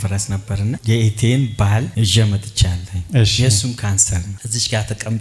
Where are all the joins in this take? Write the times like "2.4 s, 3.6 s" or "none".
none